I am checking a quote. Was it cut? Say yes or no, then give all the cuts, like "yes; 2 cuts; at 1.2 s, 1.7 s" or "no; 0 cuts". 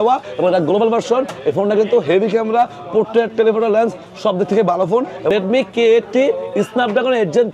yes; 1 cut; at 5.3 s